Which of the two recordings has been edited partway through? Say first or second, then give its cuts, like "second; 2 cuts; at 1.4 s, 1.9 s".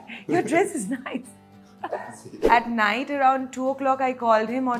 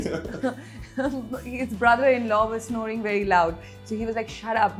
first; 1 cut; at 2.4 s